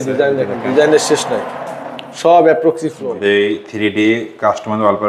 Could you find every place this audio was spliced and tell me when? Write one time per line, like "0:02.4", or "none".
0:03.2